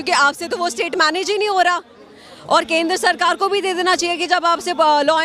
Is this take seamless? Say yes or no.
yes